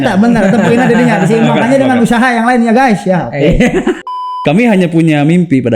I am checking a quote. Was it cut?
yes; 1 cut; at 4.1 s

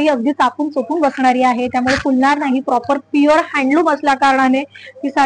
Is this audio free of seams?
yes; 0 cuts

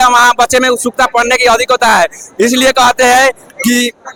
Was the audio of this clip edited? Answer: no; 0 cuts

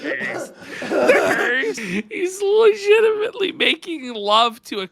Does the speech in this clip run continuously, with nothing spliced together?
no; 1 cut; at 1.9 s

